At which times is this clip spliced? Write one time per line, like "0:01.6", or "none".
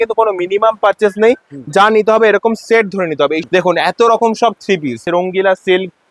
0:03.4
0:05.0

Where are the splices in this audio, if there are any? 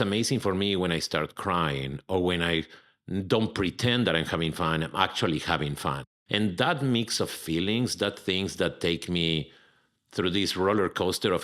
0:06.1

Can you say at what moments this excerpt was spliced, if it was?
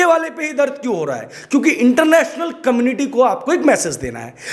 none

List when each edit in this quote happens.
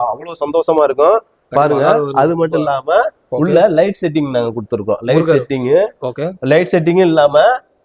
none

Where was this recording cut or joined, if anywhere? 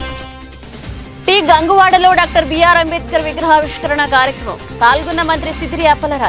0:01.0

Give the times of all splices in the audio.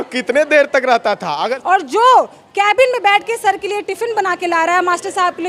0:01.3

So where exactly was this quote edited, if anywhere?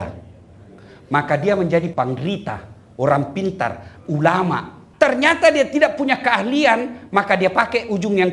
0:01.9
0:04.8

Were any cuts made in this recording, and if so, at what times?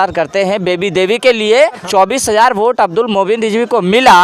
0:01.8

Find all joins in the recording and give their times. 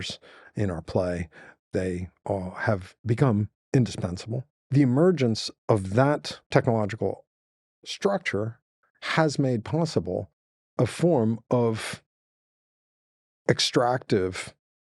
0:03.6
0:04.5
0:06.3

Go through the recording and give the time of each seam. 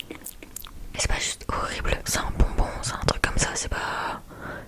0:01.0
0:02.0

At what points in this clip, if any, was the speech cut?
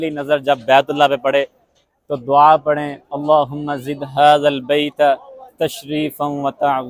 none

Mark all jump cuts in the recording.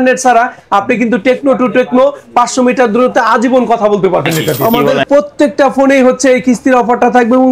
0:04.5

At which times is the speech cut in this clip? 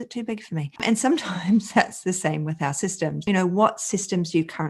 0:00.8
0:03.2

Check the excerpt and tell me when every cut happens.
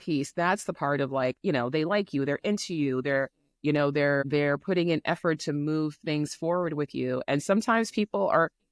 0:04.2

